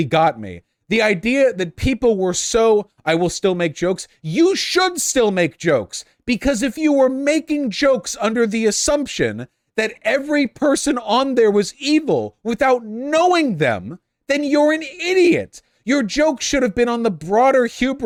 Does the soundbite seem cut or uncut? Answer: uncut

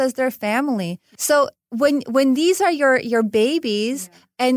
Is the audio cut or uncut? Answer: cut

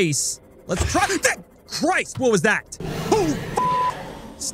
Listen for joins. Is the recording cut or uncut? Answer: cut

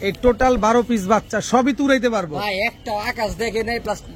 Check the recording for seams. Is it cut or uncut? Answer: uncut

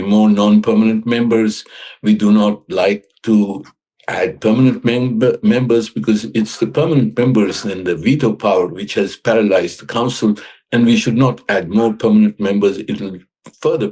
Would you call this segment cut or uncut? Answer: uncut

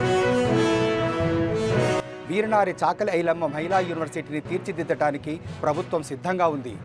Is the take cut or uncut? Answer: cut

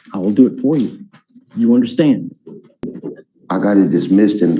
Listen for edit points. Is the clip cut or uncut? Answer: cut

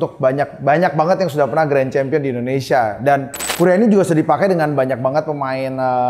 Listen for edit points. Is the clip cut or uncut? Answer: cut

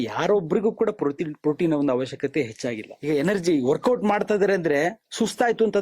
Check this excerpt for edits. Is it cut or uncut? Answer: cut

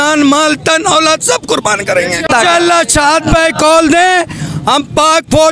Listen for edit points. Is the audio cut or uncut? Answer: cut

